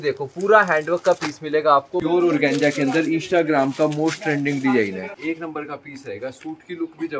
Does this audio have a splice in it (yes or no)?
yes